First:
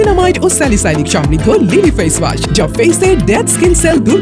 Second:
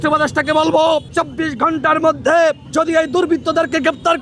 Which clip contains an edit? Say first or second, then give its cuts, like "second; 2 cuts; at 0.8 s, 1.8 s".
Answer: second; 2 cuts; at 1.1 s, 2.6 s